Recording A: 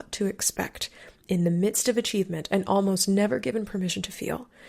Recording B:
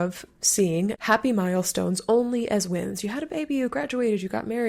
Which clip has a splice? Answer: B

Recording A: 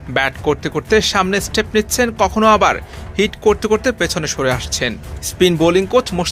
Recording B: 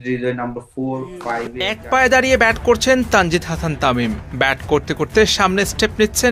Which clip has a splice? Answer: B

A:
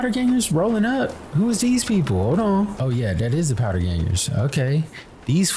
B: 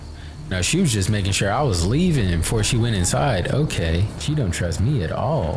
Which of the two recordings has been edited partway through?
B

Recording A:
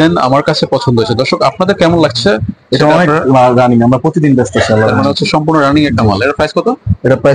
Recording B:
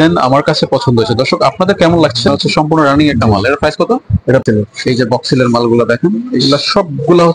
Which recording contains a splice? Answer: B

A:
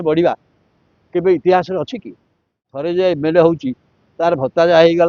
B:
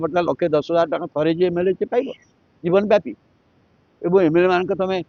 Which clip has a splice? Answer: A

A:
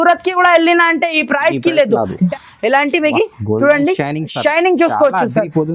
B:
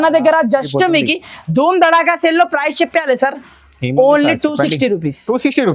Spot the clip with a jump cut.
A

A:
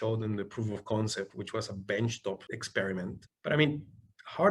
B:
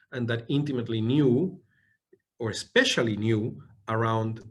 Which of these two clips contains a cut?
A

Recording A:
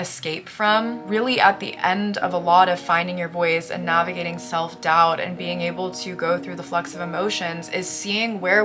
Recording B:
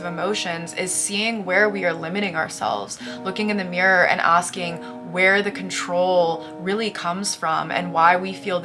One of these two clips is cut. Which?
A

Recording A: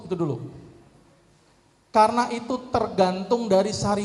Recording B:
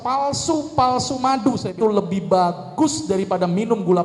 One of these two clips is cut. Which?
B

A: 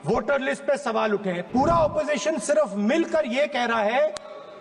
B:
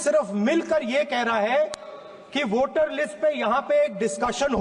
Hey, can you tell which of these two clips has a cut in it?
A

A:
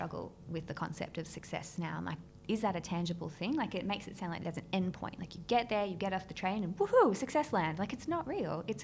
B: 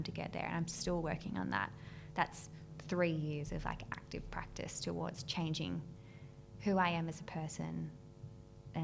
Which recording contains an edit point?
A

